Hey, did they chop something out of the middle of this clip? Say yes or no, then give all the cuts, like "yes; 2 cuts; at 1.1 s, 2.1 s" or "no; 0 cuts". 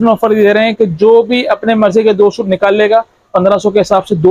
no; 0 cuts